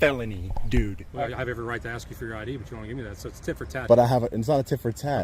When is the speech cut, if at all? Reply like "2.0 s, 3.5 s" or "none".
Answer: 1.0 s